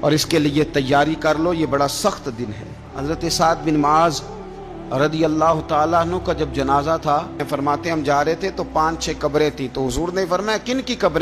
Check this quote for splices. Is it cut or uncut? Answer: cut